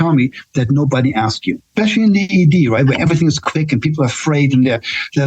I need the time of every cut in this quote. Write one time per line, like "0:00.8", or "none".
0:01.7